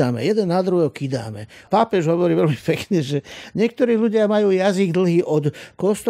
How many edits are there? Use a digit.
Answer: 1